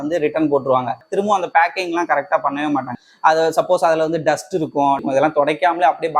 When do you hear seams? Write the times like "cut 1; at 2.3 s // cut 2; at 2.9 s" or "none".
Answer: cut 1; at 1.1 s // cut 2; at 2.9 s // cut 3; at 5.0 s